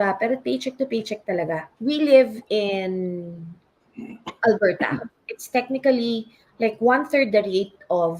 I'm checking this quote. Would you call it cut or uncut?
cut